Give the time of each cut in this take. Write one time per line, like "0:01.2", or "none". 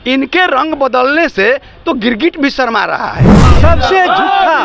0:03.4